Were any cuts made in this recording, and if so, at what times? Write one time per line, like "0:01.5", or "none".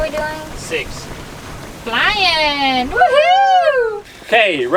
none

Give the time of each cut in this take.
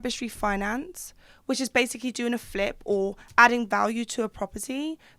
none

